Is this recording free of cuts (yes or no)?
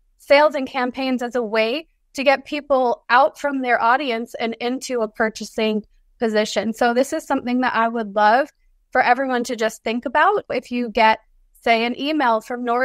yes